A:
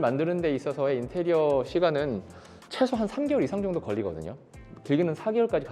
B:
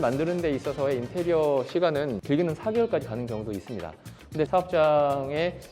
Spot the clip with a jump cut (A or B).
B